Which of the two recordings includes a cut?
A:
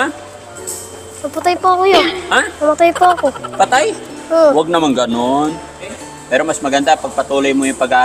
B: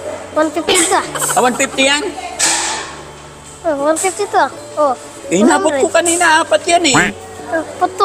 A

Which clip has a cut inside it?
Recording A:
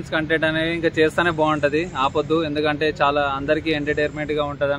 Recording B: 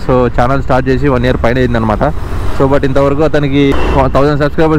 B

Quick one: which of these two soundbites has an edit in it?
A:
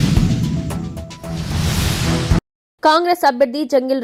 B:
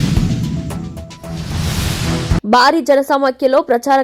B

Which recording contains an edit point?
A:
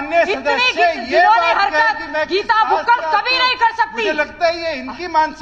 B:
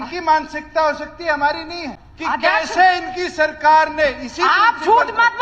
B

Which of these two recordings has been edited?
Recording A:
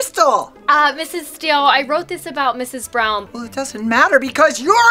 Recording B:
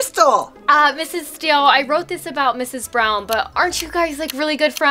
A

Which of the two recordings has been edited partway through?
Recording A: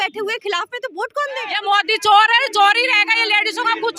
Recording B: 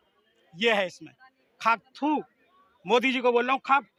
A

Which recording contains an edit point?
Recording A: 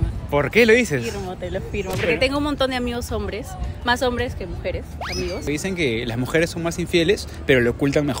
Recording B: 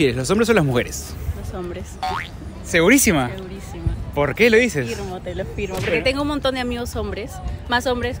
A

